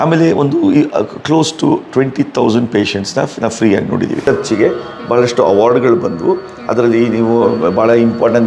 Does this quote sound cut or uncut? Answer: cut